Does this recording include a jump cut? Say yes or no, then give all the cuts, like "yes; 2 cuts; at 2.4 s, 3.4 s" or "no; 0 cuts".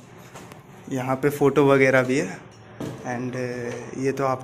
no; 0 cuts